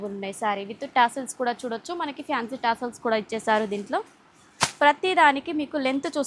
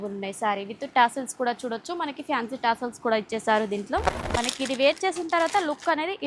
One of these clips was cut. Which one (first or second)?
second